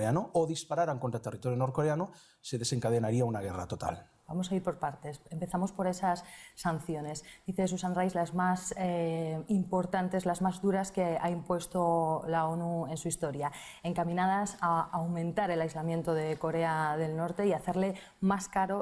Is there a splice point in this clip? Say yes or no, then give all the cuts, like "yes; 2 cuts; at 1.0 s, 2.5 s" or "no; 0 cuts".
no; 0 cuts